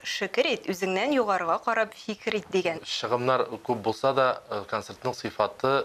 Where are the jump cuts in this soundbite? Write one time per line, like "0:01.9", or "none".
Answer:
0:02.9